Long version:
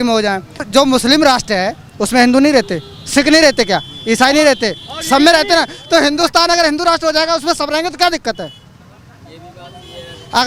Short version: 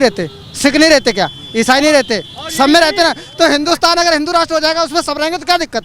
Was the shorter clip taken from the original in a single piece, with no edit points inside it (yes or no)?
yes